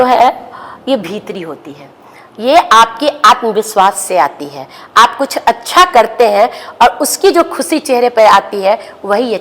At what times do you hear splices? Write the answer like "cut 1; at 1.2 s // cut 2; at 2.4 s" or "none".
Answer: none